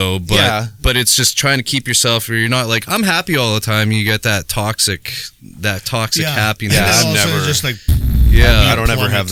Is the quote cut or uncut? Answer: uncut